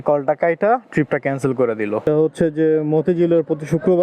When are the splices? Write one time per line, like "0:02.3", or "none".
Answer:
0:02.0